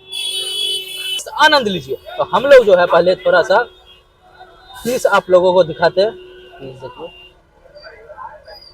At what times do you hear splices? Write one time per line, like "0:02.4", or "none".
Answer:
0:01.3